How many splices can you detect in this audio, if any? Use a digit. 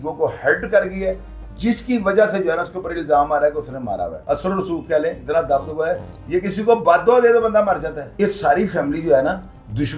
2